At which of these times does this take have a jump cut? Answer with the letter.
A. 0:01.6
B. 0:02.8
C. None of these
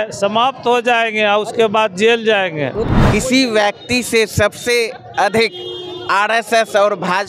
B